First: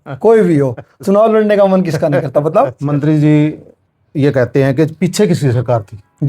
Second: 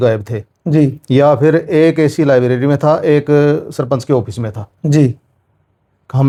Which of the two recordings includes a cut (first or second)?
first